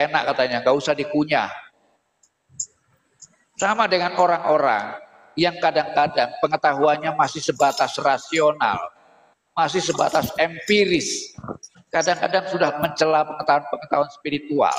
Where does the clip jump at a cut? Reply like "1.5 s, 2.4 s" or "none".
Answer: 12.7 s